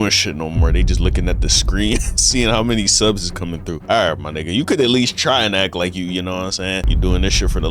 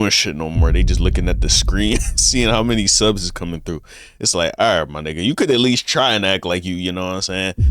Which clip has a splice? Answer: first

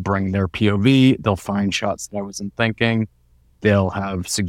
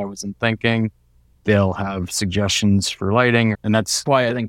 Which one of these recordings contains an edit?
second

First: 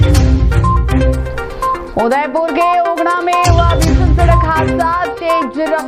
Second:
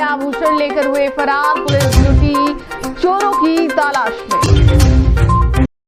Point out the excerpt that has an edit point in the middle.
first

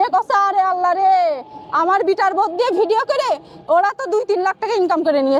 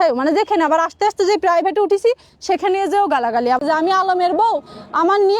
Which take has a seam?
second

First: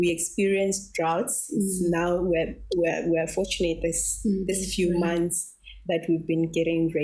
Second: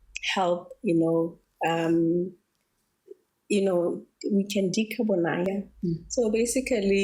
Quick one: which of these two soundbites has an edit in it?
second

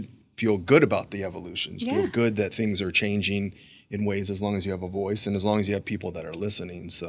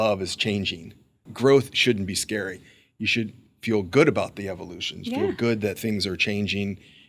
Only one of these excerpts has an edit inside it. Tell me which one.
second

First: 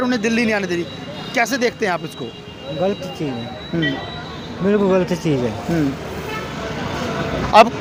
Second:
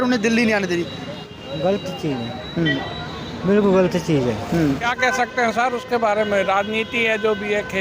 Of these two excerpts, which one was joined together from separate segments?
second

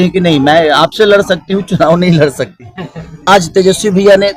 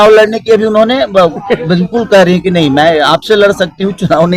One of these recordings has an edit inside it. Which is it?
first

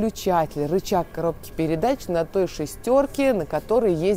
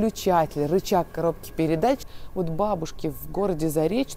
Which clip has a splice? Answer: second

